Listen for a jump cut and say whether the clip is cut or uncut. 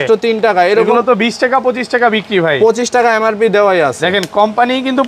uncut